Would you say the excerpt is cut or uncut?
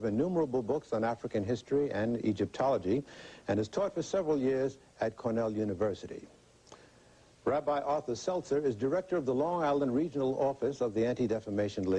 uncut